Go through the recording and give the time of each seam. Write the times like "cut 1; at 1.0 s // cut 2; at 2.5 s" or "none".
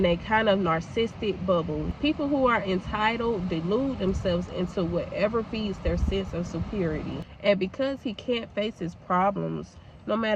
cut 1; at 1.9 s // cut 2; at 7.2 s